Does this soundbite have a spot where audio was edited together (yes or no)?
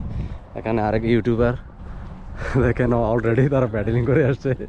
no